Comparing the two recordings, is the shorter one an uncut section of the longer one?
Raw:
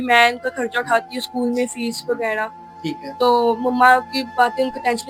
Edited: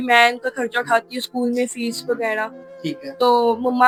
yes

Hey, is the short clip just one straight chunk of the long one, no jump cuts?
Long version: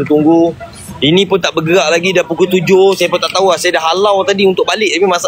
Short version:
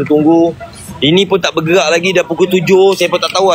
yes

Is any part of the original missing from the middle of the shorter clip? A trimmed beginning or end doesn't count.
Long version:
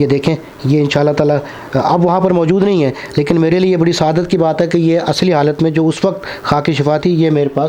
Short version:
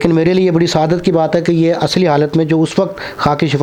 no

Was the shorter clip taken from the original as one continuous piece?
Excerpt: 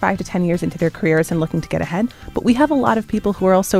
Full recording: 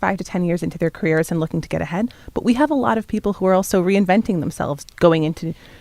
yes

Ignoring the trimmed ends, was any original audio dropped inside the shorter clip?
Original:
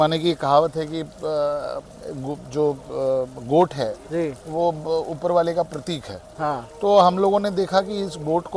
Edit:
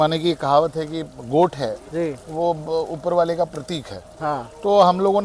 yes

